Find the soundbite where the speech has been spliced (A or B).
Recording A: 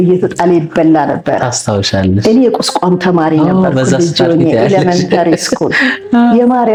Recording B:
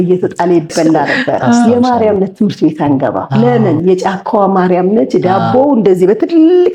B